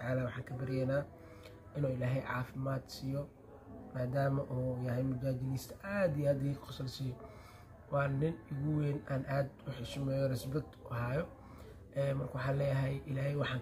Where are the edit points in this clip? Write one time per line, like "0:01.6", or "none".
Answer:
none